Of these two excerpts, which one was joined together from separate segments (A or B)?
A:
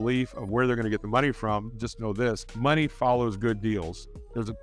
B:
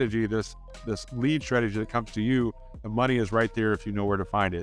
A